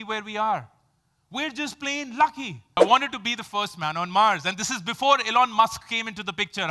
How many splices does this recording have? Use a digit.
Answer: 1